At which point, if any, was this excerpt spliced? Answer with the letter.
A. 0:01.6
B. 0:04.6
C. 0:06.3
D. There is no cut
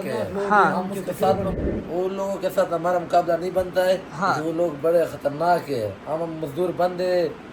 A